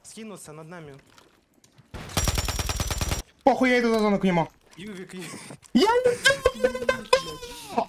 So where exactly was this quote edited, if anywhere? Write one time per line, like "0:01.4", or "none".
0:03.2

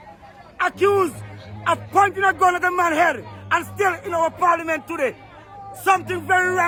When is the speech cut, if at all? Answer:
none

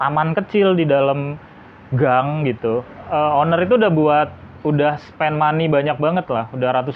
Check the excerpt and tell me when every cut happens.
0:03.0

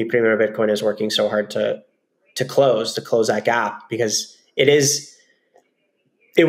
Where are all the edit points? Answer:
none

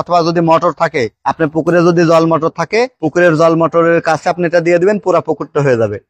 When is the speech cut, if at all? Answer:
none

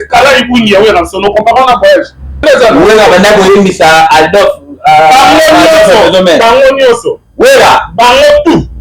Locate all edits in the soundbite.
0:02.4

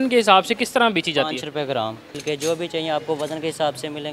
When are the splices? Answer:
0:02.2

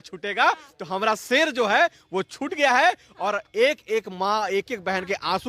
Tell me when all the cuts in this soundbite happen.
none

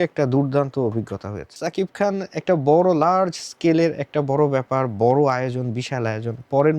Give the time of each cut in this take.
0:01.5

